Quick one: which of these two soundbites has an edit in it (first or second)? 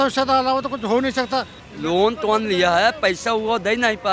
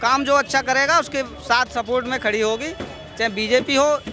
first